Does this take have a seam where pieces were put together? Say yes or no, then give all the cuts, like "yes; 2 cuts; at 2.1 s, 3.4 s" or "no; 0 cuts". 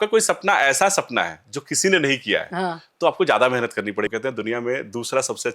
yes; 1 cut; at 4.1 s